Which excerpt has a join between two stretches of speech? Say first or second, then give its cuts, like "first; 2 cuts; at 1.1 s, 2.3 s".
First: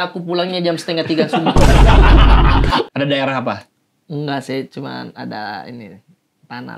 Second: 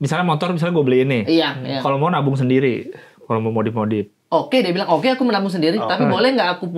first; 1 cut; at 2.9 s